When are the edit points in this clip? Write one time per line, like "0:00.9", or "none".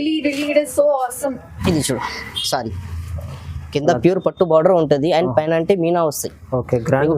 0:01.5